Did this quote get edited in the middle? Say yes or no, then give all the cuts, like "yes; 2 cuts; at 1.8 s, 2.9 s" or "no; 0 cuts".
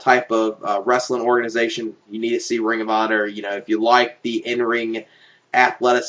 yes; 1 cut; at 4.2 s